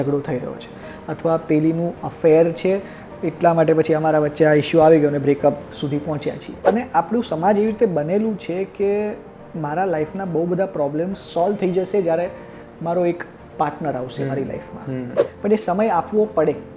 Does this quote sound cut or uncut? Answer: cut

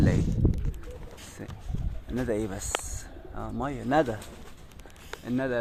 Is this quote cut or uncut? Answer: uncut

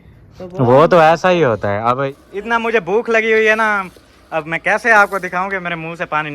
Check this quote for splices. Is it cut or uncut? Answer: cut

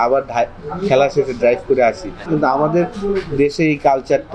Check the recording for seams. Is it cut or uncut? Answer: cut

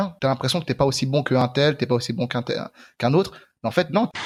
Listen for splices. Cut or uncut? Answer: uncut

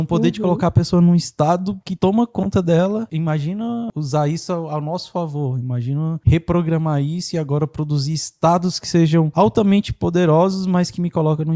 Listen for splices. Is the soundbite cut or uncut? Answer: cut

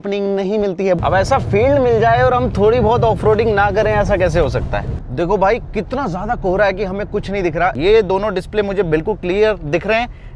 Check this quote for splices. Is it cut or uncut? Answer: cut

